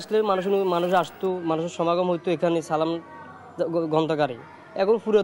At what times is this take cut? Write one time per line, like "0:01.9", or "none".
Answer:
none